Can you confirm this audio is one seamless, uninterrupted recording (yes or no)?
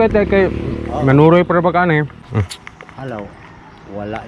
no